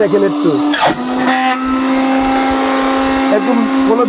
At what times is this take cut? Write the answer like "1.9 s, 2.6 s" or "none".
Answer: none